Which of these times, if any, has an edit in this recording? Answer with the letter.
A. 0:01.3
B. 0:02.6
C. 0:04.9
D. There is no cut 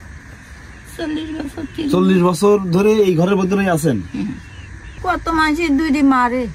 C